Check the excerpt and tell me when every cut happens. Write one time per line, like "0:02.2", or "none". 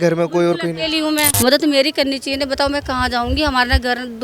0:01.3